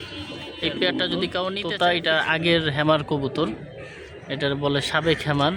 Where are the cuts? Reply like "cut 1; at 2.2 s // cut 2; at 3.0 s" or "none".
cut 1; at 1.6 s